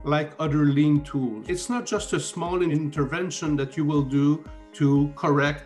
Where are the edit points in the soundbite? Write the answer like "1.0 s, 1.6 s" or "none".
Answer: 1.4 s, 2.7 s

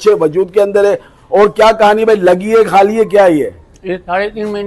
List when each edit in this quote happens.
none

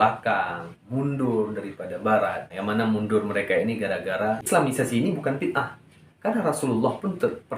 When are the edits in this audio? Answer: 4.4 s

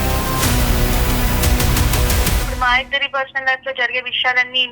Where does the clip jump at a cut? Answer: 2.5 s

